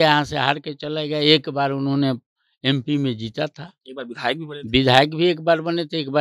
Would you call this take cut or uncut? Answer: uncut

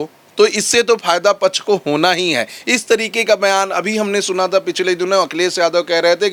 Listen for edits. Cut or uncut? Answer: uncut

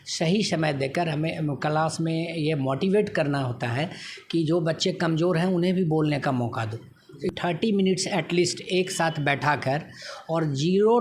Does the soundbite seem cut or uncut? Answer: cut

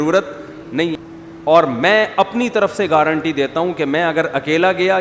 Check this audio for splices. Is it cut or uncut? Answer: cut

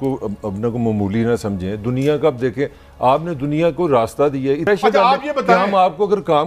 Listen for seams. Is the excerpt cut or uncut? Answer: uncut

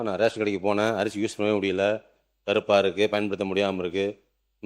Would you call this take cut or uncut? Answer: uncut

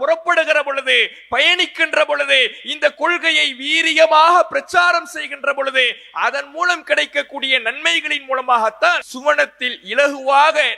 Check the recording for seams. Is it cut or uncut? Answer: cut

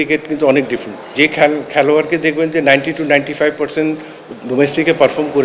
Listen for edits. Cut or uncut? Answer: cut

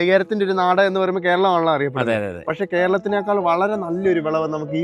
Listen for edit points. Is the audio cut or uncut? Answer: uncut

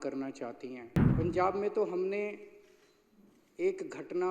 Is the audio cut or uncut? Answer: cut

